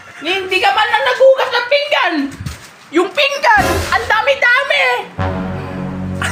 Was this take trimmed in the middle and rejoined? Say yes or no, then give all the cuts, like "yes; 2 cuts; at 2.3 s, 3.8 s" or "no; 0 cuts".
no; 0 cuts